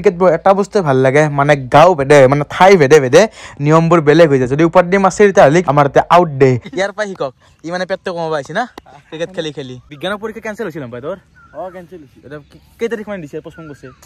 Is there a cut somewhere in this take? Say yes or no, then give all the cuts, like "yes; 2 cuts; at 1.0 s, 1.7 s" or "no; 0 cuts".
yes; 3 cuts; at 5.7 s, 6.7 s, 9.9 s